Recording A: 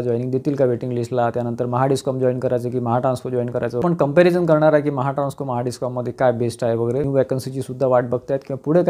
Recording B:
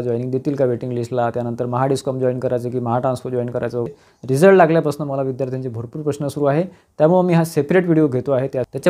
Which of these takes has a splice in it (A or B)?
A